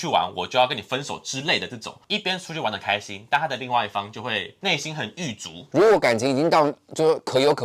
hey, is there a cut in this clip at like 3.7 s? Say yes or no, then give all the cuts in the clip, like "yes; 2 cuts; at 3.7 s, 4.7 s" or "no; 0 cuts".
no; 2 cuts; at 2.0 s, 5.6 s